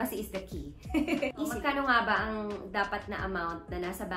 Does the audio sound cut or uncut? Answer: cut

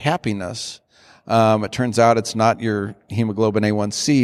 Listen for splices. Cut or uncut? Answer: uncut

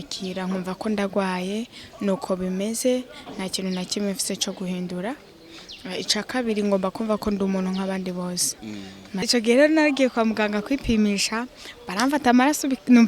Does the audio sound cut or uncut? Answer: cut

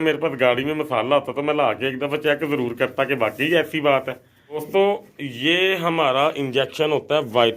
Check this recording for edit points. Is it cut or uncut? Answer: cut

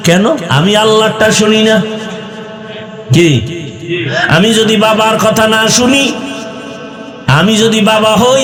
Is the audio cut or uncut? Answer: uncut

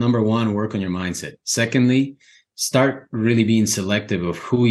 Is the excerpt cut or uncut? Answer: uncut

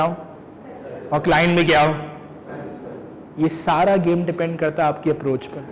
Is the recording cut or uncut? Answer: uncut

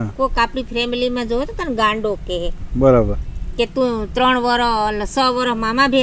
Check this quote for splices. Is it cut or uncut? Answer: uncut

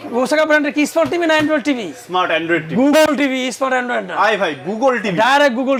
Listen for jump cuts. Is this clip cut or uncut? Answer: uncut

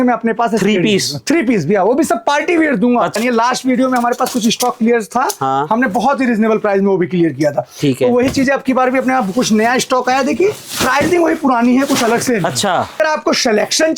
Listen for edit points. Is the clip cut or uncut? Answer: cut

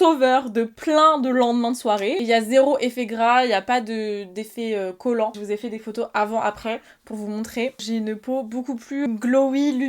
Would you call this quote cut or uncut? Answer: cut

